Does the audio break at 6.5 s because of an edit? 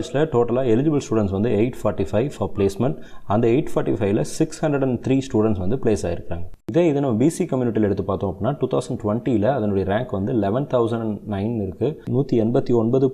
yes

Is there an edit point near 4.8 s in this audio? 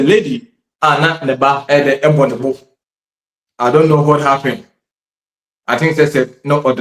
no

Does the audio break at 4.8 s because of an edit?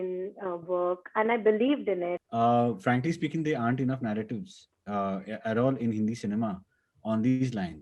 no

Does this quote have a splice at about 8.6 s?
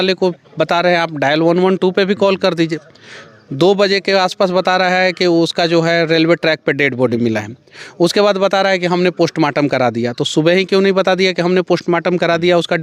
no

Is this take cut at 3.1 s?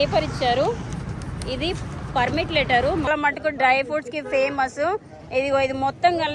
yes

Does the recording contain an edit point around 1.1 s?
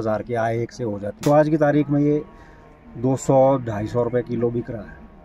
yes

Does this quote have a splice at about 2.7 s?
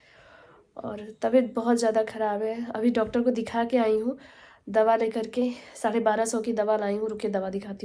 no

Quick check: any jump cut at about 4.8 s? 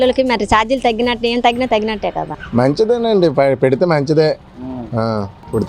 no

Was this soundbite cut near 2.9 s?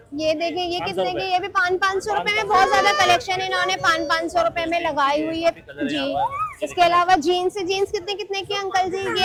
no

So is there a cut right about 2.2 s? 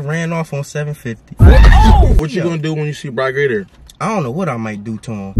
yes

